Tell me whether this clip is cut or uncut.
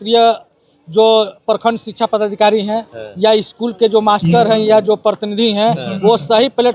uncut